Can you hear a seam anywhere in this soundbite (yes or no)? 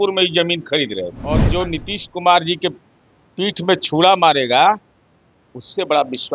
yes